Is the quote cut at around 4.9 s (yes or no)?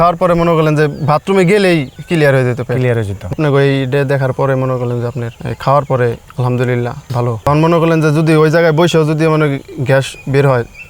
no